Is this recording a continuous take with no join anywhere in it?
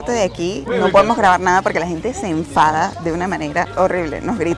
yes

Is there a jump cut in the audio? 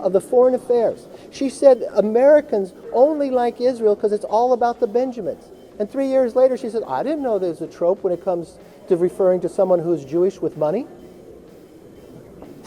no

